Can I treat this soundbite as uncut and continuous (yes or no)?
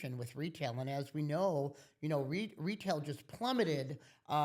yes